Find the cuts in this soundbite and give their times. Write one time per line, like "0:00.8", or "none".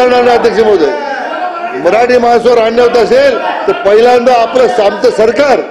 none